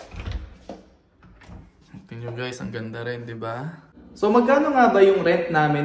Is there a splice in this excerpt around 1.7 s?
no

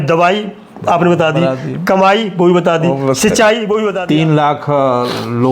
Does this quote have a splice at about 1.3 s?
no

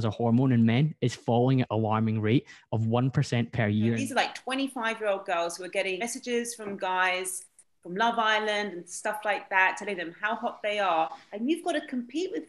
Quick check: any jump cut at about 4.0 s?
yes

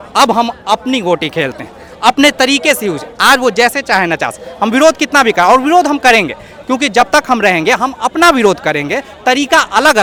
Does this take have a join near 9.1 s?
no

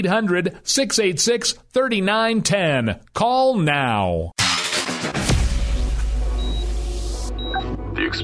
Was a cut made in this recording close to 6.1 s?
no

